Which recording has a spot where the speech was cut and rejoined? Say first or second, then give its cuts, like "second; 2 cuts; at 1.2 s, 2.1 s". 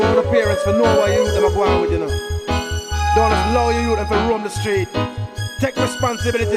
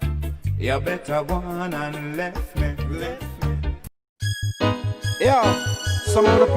second; 1 cut; at 4.1 s